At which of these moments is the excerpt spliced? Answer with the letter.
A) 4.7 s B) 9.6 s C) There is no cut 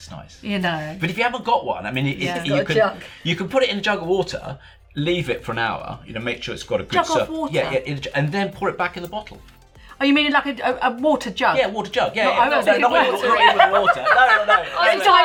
C